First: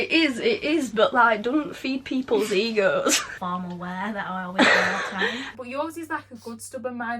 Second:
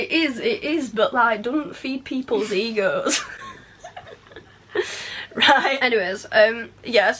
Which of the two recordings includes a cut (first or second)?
first